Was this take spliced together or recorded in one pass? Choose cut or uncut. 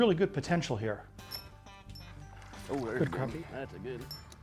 cut